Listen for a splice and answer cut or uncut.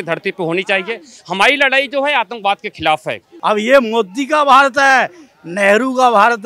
cut